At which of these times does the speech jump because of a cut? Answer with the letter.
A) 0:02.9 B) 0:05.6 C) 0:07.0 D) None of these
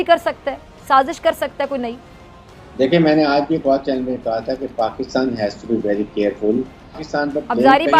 C